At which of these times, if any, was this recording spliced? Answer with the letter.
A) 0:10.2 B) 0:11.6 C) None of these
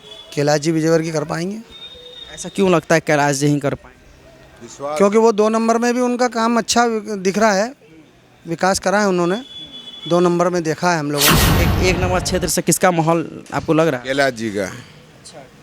B